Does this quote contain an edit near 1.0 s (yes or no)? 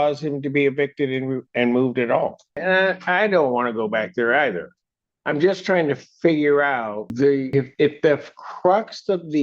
no